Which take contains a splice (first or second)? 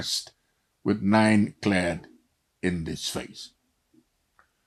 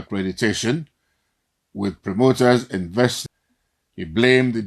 second